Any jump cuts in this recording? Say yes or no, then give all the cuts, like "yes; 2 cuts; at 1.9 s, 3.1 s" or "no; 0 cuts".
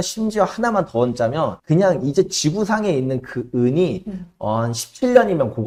no; 0 cuts